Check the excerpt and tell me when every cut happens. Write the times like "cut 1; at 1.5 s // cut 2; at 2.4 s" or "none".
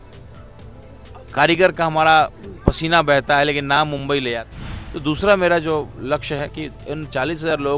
cut 1; at 4.4 s